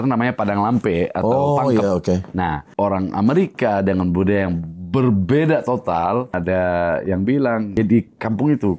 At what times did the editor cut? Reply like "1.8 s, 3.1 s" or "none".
2.7 s, 6.4 s, 7.8 s